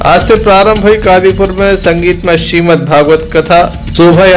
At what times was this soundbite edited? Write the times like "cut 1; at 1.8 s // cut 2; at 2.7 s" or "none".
none